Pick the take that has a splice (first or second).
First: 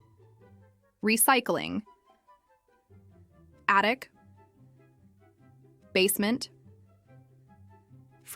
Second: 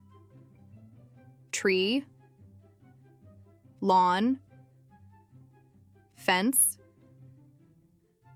first